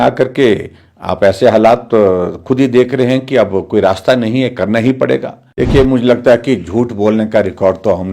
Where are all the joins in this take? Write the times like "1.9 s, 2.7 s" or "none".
5.4 s